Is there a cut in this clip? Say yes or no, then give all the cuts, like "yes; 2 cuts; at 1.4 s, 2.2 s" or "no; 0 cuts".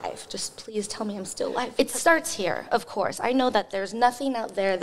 yes; 1 cut; at 1.7 s